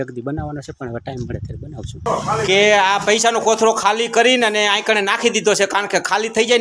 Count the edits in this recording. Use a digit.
1